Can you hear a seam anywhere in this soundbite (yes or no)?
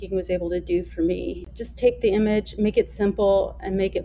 yes